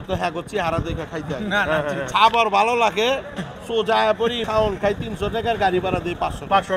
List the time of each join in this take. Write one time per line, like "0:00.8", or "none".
0:02.1
0:04.4